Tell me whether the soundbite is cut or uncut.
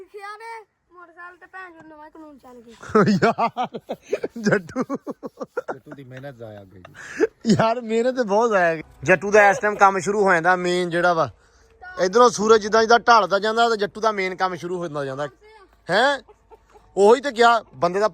cut